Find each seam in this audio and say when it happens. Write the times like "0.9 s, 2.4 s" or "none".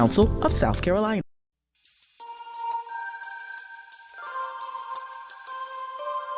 1.2 s